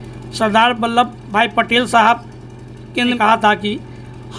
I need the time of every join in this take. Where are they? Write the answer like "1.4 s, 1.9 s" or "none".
1.2 s, 3.1 s

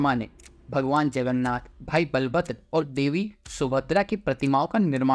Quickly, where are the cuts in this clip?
none

